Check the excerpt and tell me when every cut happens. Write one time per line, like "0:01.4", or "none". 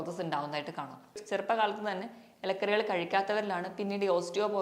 0:01.2